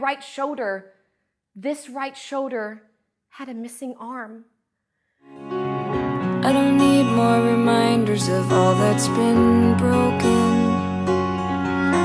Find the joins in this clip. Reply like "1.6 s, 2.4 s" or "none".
5.5 s

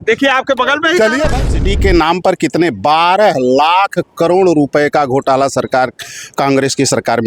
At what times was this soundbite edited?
1.3 s

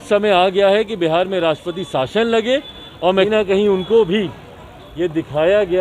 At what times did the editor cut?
3.3 s

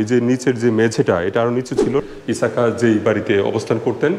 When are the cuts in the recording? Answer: 2.0 s

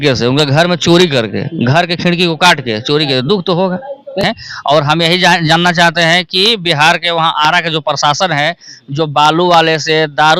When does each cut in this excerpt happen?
4.2 s

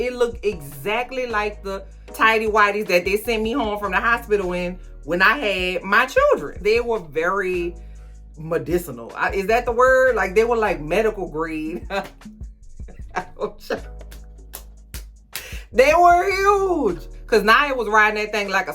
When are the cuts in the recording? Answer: 6.5 s, 17.1 s

